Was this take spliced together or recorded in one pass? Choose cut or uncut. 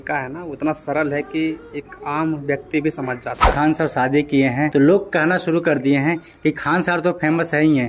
cut